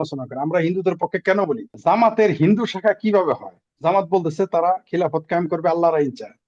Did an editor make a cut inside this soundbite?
yes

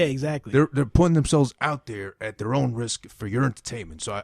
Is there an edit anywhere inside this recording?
no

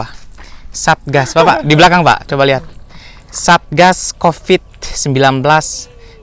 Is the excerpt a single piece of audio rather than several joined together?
yes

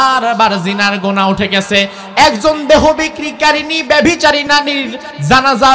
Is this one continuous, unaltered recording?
no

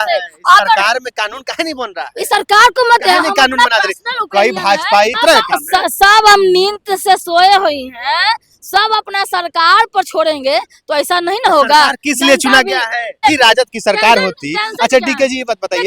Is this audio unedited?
no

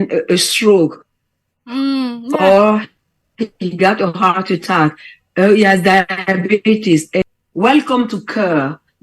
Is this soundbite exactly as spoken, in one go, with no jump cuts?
no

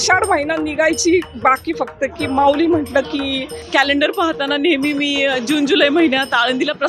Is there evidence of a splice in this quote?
yes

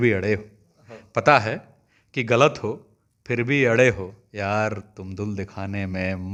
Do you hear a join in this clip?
no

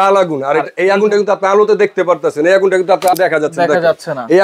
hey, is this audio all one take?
no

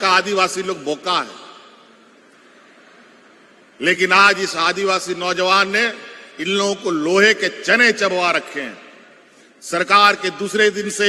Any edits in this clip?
no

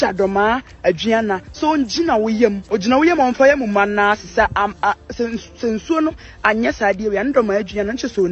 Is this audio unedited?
no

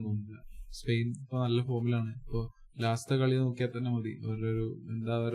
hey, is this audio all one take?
yes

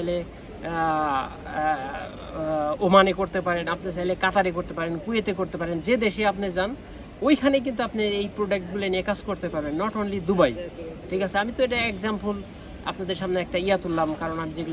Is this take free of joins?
yes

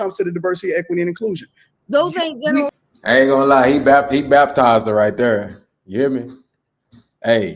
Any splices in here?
yes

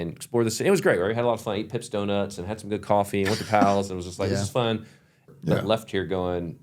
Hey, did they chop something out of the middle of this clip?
yes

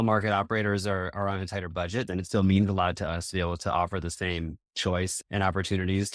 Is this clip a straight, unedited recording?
no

